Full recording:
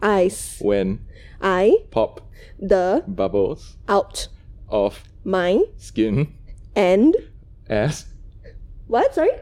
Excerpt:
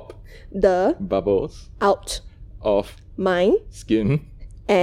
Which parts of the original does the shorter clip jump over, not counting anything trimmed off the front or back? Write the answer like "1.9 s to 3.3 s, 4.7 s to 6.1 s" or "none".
none